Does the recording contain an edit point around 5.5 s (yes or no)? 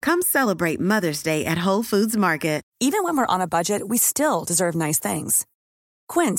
no